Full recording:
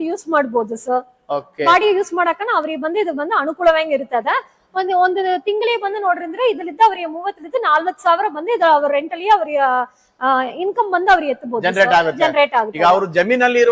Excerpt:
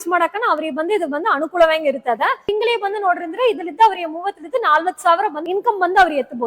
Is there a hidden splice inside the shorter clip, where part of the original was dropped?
yes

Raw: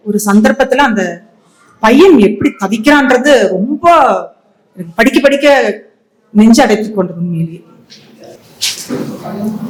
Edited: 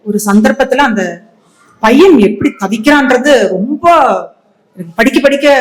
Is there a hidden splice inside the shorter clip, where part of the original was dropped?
no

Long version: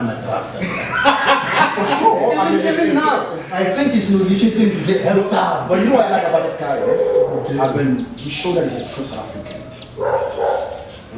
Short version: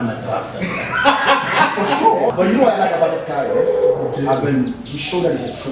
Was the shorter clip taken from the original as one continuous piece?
no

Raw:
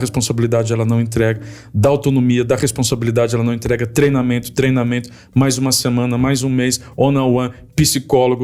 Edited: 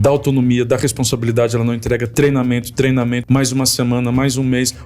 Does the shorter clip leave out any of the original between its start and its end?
yes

